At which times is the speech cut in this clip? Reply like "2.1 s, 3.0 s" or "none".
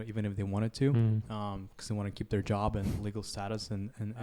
none